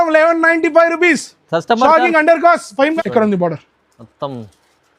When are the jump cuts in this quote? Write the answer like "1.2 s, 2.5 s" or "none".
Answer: 2.9 s

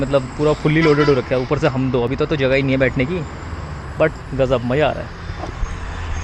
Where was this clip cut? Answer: none

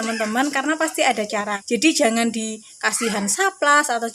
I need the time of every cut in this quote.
1.5 s

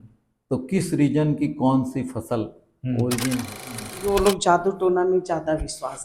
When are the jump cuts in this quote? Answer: 3.9 s

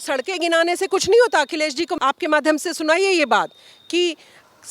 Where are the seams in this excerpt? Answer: 1.9 s

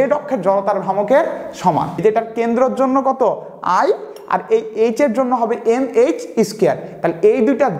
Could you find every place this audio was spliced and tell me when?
2.0 s

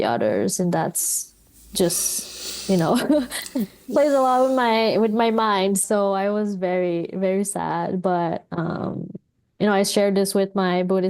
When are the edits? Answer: 3.8 s, 5.8 s

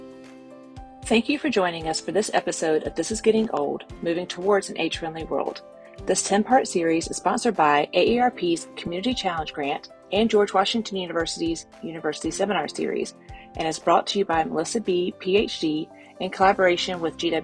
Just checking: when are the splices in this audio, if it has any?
1.0 s

